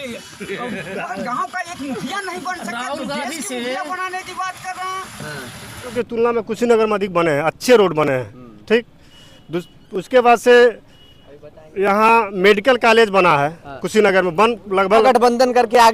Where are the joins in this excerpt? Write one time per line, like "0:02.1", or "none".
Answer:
0:05.9
0:15.0